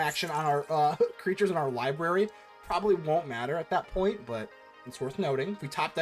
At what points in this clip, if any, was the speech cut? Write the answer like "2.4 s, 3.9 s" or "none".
none